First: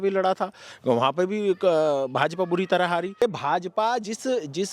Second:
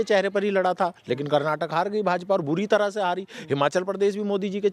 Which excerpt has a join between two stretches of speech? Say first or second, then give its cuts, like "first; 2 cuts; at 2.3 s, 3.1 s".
first; 1 cut; at 3.2 s